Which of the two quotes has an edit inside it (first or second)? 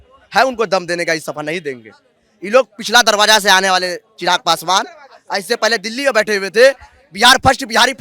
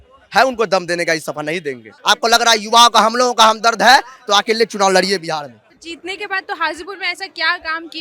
second